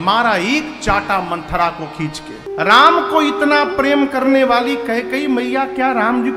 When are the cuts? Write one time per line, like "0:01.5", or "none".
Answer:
0:02.4